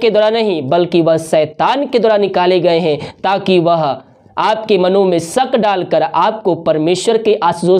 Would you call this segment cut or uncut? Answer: uncut